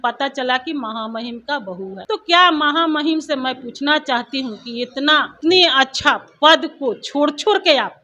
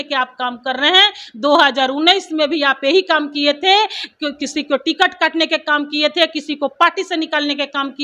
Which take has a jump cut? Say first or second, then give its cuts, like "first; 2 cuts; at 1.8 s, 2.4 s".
first; 2 cuts; at 2.0 s, 5.3 s